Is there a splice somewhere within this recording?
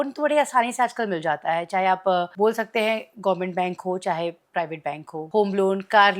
yes; 2 cuts; at 2.3 s, 5.2 s

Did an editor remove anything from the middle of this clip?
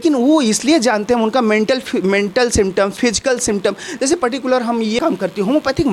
yes; 1 cut; at 5.0 s

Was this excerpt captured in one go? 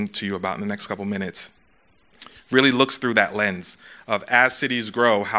yes; 0 cuts

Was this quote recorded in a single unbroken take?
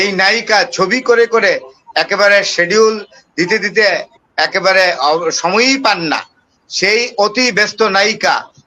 yes; 0 cuts

